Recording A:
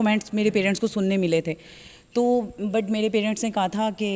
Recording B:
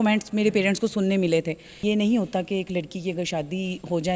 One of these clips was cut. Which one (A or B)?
B